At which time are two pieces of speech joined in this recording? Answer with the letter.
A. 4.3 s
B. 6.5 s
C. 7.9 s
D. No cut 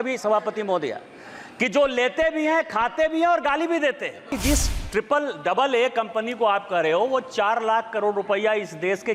A